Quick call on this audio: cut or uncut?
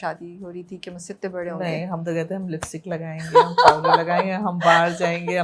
uncut